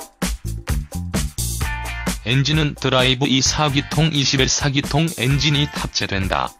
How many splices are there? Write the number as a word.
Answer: one